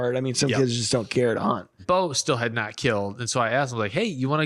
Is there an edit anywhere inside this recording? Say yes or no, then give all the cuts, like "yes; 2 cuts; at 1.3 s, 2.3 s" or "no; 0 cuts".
yes; 1 cut; at 1.7 s